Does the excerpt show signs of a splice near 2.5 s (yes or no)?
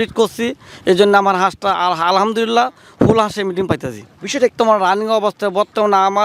no